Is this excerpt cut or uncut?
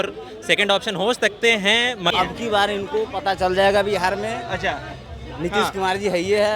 cut